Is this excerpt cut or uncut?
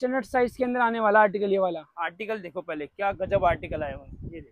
uncut